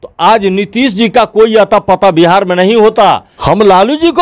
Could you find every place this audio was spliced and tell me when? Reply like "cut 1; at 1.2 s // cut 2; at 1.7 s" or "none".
cut 1; at 3.3 s